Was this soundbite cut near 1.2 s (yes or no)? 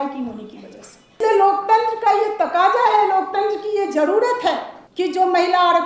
yes